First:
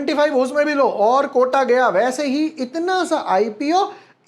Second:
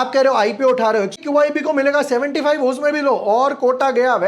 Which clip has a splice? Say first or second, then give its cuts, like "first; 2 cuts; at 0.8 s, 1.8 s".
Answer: second; 1 cut; at 1.2 s